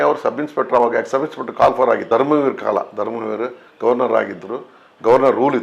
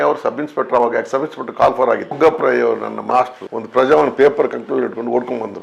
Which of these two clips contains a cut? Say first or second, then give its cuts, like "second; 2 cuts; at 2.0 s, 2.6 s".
second; 1 cut; at 2.0 s